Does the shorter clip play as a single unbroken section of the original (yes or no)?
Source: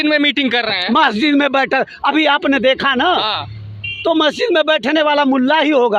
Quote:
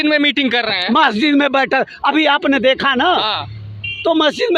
yes